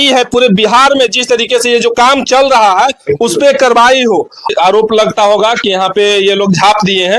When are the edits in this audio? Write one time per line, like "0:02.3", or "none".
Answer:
0:04.5